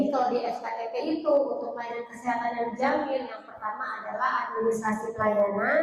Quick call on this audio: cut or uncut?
uncut